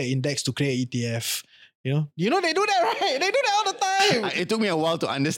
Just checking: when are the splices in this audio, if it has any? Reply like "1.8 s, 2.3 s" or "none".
none